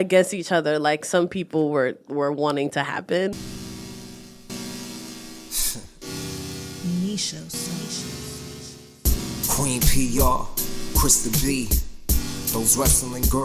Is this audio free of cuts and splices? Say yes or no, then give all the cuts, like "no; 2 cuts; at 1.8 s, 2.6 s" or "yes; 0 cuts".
no; 1 cut; at 3.3 s